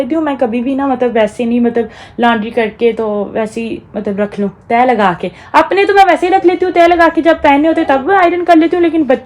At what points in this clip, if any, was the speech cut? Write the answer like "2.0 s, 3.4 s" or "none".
none